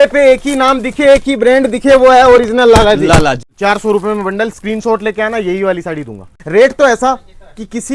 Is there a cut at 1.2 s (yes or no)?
no